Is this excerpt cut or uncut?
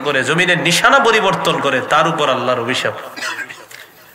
uncut